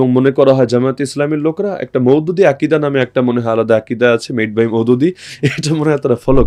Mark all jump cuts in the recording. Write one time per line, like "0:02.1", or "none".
none